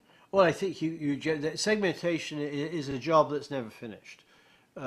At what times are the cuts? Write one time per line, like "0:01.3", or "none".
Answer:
0:01.5